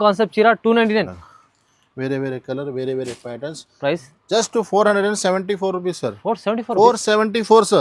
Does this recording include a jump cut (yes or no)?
yes